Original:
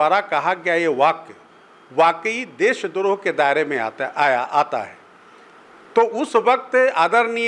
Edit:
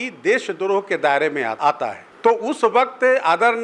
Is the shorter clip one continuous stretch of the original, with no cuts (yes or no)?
no